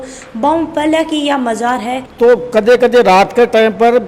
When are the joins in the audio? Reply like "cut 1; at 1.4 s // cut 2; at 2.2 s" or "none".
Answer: cut 1; at 2.0 s